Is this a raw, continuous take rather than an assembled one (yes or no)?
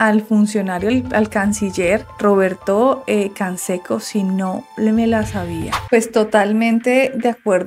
no